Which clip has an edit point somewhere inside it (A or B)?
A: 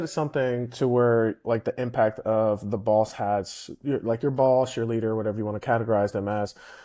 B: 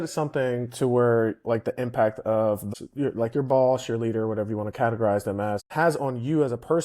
B